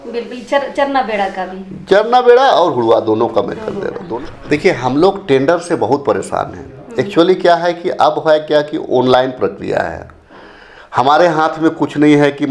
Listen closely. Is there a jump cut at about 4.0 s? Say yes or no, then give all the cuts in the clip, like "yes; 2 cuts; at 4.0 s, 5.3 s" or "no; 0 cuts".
yes; 1 cut; at 4.0 s